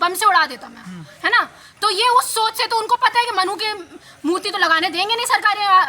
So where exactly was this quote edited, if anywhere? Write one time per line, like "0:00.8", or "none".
none